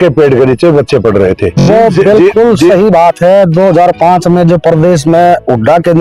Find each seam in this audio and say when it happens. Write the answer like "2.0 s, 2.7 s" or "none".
1.6 s